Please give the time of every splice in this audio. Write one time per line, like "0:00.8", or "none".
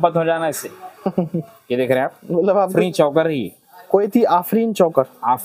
0:02.7